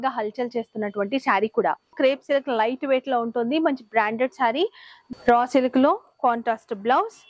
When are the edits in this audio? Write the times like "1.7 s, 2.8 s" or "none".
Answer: 1.9 s, 4.7 s

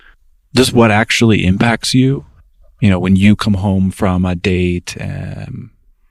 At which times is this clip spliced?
2.3 s

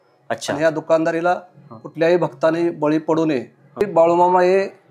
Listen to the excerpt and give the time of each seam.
3.8 s

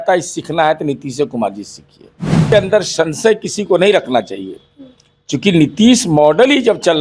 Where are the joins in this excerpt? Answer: 2.5 s

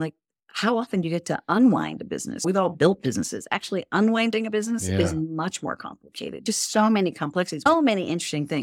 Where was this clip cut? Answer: 6.4 s, 7.7 s

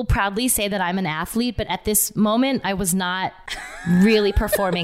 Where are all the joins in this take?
none

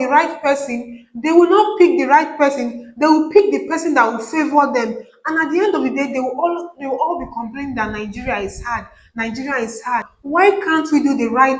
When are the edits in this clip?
10.1 s

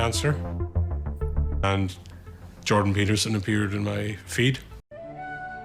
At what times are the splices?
1.6 s

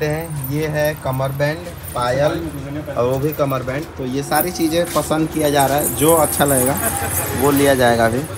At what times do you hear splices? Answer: none

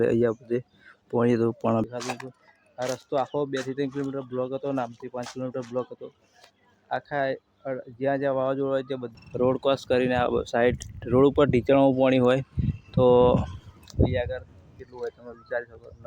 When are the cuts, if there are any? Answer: 1.8 s, 9.0 s

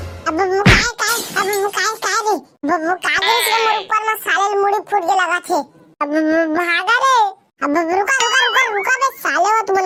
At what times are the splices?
none

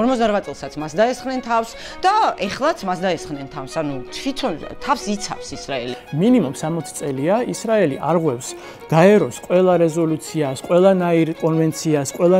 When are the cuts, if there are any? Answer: 6.0 s

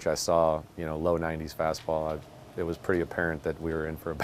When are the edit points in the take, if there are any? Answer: none

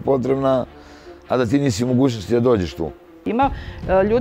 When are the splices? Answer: 3.1 s

